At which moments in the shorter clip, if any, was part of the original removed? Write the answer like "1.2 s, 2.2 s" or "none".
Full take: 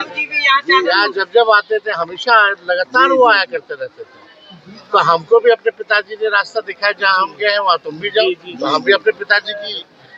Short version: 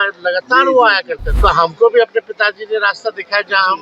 1.2 s

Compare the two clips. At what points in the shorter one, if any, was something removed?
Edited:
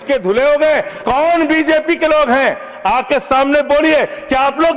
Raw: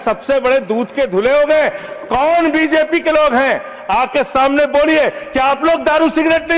0.9 s

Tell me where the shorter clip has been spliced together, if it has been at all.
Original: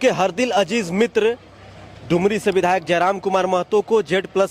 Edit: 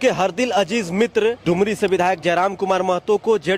1.4 s

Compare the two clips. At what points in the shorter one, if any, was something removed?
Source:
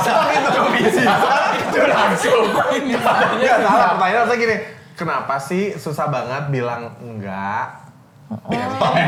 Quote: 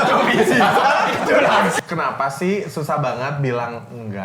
1.8 s

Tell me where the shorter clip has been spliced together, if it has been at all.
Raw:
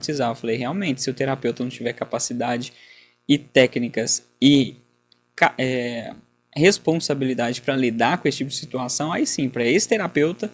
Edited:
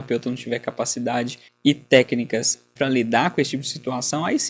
1.4 s, 2.7 s

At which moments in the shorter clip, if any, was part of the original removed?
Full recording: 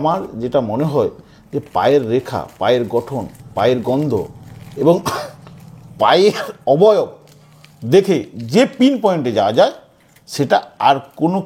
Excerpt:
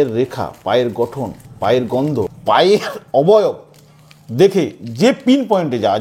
2.3 s

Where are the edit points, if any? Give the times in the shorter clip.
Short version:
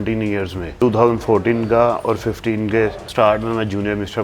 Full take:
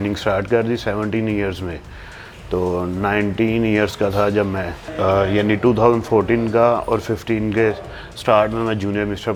0.8 s, 3.0 s

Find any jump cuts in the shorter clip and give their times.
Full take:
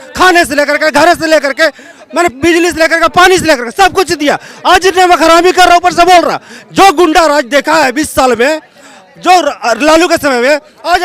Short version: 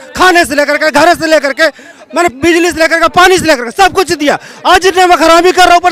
none

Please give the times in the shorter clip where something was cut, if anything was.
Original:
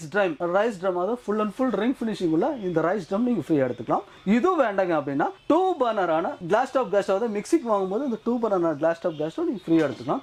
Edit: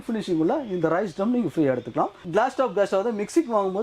2.2 s

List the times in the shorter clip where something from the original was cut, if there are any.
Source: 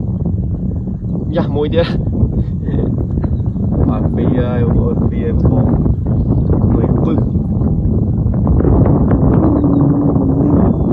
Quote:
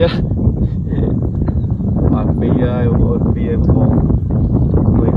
none

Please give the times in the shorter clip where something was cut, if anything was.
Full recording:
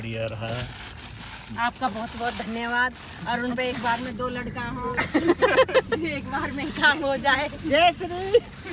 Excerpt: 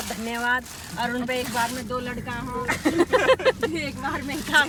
none

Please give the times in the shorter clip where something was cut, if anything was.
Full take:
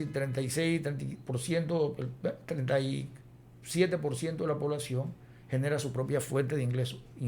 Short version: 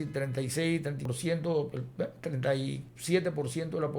1.1 s, 2.9 s

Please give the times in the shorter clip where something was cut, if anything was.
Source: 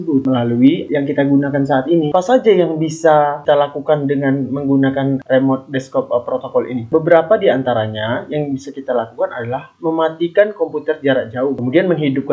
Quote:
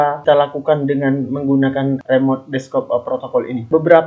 none

